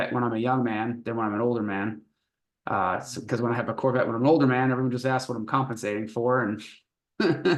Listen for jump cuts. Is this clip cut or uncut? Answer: uncut